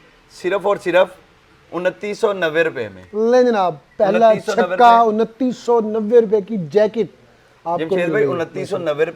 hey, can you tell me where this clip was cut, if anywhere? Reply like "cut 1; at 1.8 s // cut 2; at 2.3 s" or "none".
none